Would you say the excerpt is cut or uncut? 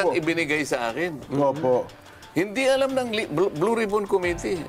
uncut